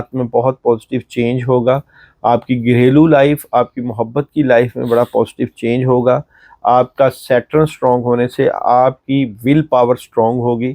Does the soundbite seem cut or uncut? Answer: uncut